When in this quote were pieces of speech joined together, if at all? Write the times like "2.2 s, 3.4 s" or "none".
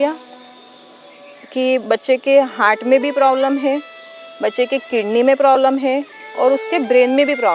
none